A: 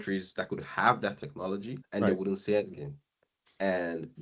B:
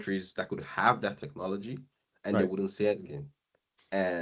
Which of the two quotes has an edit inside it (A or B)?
A